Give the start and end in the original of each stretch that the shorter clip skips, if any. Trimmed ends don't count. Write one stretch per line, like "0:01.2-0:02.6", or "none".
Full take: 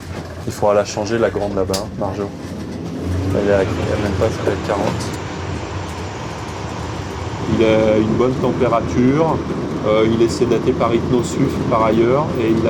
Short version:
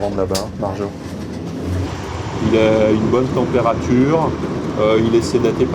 0:03.2-0:06.9